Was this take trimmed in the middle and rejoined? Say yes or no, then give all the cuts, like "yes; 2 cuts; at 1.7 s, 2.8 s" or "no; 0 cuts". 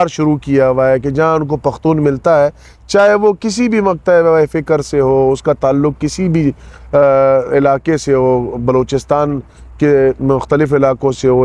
no; 0 cuts